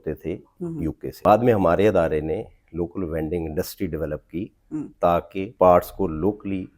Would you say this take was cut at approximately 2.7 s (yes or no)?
no